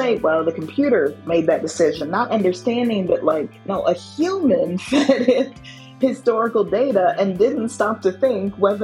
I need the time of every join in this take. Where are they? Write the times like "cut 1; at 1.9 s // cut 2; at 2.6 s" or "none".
cut 1; at 1.2 s